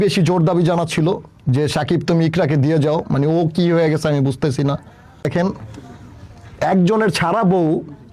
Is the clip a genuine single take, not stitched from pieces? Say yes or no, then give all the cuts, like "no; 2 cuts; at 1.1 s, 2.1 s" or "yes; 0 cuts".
no; 1 cut; at 5.2 s